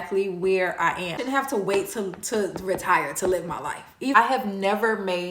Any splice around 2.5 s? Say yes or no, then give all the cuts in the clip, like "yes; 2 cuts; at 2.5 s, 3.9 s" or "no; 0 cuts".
no; 2 cuts; at 1.2 s, 4.1 s